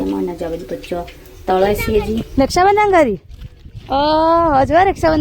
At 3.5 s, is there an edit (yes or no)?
no